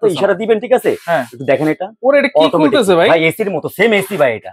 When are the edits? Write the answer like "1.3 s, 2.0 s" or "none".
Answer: none